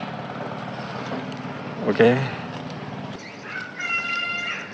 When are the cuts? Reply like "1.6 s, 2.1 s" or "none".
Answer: 3.2 s